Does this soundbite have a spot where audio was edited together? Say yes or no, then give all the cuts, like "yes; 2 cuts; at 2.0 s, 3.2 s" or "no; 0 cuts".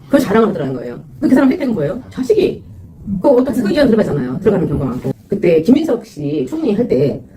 yes; 1 cut; at 5.2 s